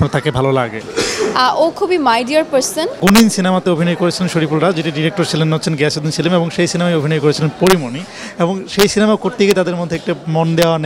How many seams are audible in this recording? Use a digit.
1